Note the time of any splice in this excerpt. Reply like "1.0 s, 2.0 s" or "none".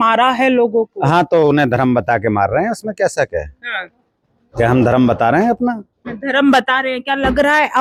none